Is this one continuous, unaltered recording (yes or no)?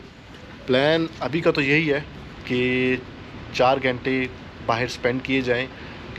yes